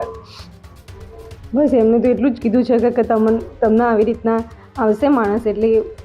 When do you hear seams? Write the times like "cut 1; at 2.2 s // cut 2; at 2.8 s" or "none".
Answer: cut 1; at 1.1 s